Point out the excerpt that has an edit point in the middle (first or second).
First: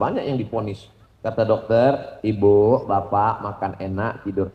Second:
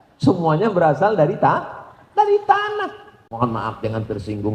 second